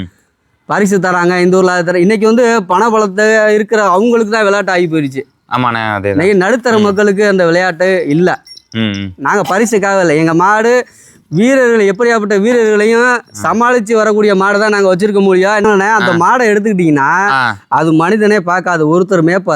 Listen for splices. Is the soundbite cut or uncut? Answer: cut